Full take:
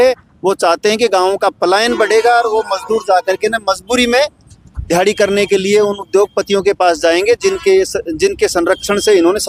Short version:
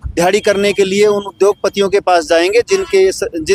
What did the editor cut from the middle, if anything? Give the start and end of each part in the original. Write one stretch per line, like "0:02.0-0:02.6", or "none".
none